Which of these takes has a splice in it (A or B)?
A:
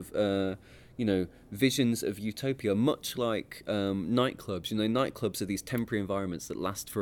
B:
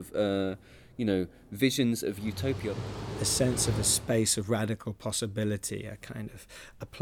B